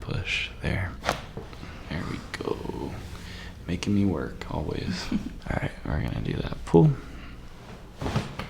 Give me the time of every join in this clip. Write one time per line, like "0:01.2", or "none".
0:05.4